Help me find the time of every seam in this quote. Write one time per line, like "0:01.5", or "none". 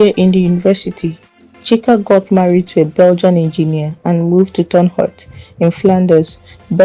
0:05.9